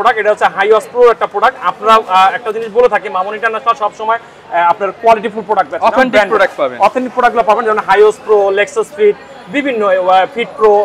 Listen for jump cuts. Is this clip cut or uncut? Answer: uncut